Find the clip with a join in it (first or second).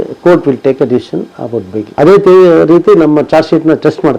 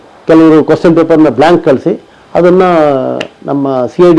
first